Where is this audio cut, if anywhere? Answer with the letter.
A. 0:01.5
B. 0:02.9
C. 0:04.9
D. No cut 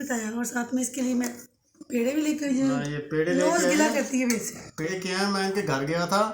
C